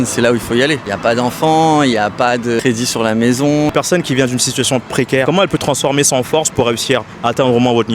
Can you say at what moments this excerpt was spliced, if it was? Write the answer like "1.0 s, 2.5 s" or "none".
0.9 s, 2.6 s, 3.7 s, 5.2 s